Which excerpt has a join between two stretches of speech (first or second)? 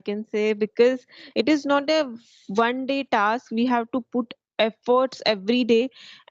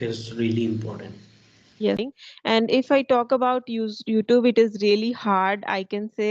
second